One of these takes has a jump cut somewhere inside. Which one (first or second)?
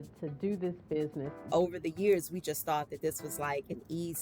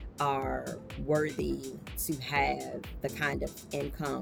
first